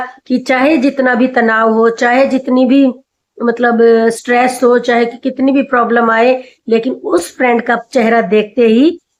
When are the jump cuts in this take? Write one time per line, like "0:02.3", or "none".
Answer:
none